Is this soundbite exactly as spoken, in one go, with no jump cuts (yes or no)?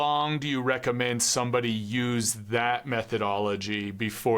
yes